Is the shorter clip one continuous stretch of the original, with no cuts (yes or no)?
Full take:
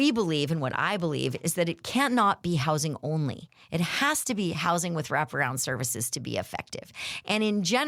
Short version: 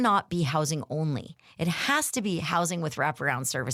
yes